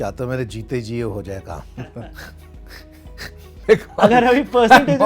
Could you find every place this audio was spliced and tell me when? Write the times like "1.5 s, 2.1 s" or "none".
none